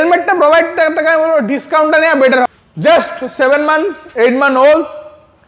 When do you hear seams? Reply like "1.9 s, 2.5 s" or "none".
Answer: 2.5 s